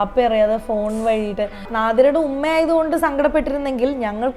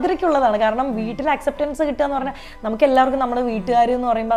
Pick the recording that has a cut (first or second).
first